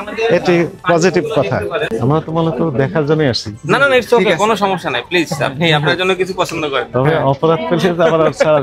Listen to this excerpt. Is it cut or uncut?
cut